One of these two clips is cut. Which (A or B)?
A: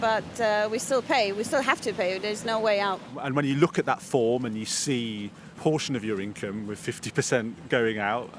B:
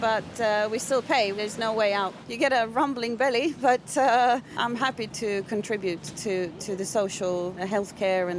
B